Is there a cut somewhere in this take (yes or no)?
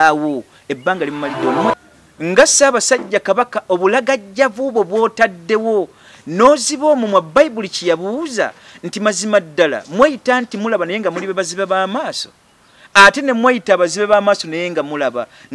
yes